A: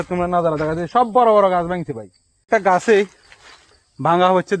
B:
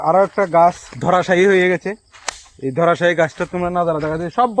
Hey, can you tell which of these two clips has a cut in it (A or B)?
A